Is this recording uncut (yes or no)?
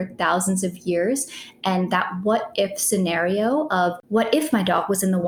no